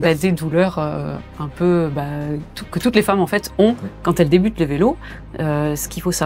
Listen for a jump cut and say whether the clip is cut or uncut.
uncut